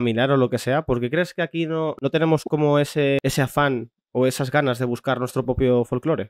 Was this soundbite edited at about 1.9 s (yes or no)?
yes